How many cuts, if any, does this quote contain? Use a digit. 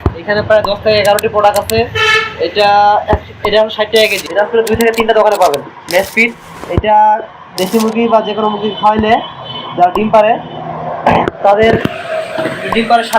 1